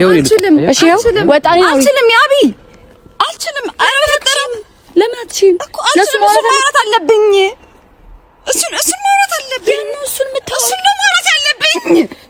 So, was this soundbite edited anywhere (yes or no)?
no